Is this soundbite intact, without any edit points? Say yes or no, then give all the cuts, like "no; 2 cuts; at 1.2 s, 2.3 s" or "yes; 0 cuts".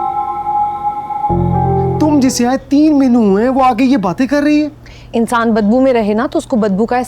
no; 1 cut; at 1.9 s